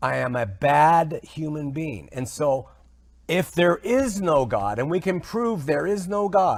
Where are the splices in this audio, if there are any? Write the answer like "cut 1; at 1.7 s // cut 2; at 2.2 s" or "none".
none